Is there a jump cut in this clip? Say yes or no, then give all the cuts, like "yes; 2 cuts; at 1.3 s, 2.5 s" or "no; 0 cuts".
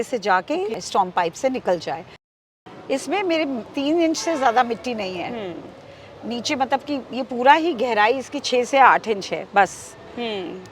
yes; 3 cuts; at 0.8 s, 2.4 s, 3.7 s